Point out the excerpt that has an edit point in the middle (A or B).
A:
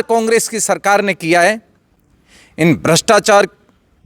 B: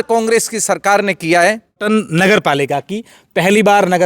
B